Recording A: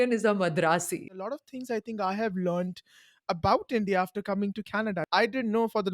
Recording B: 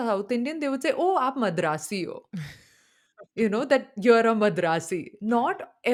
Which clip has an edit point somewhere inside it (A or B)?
A